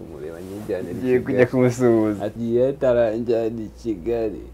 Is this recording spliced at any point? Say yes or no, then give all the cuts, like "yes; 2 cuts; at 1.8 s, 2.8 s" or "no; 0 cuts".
yes; 1 cut; at 2.3 s